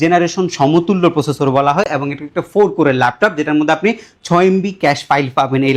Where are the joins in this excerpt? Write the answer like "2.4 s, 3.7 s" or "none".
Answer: none